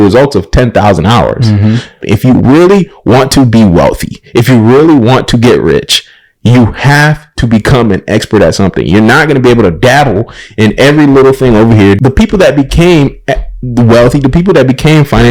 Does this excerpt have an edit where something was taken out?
yes; 2 cuts; at 2.0 s, 12.0 s

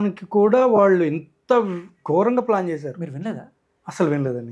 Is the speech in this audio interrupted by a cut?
no; 0 cuts

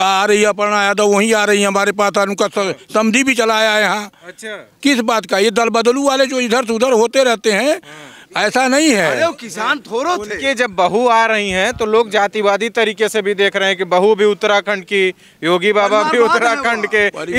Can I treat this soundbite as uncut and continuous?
yes; 0 cuts

